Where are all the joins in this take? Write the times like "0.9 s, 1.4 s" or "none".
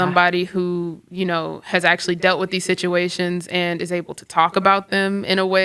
none